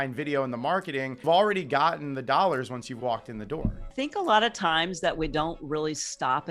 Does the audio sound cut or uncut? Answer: cut